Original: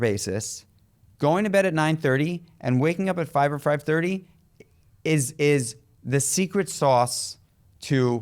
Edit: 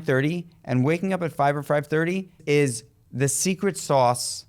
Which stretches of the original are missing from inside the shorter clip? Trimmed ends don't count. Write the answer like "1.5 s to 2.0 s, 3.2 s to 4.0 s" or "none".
4.3 s to 5.3 s